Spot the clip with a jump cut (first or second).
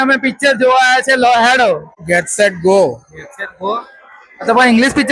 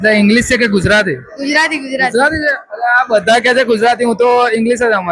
first